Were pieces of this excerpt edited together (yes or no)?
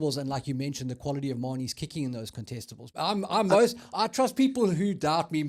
yes